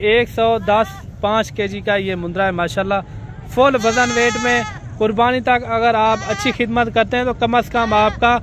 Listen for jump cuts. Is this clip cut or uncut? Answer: uncut